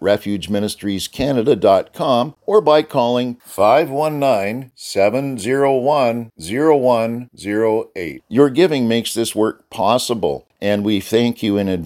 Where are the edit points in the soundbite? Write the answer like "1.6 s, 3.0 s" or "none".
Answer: 2.4 s, 10.5 s